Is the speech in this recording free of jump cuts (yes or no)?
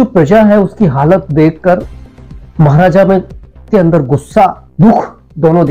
no